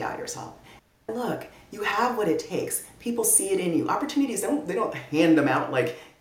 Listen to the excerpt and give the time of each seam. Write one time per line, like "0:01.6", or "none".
0:01.0